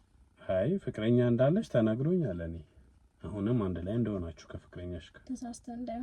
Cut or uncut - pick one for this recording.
uncut